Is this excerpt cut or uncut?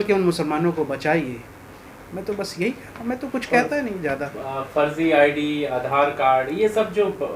uncut